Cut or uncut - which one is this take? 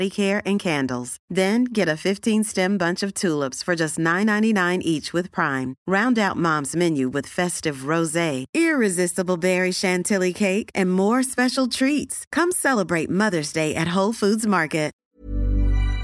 cut